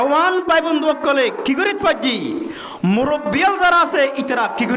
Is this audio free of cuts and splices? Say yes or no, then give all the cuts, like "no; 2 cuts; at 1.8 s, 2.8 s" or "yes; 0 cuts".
yes; 0 cuts